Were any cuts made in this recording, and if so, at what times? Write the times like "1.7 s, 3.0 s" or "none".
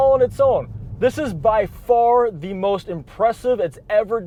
none

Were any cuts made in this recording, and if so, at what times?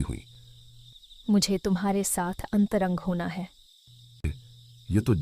4.3 s

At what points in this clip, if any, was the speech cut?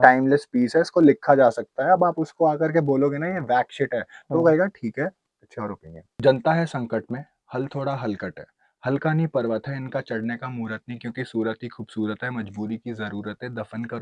6.1 s

